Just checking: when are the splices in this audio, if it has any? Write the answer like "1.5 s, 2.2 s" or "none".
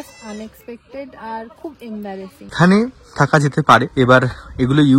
2.5 s, 3.9 s